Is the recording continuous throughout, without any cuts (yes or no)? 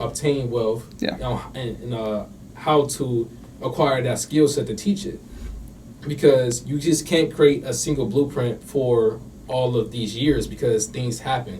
yes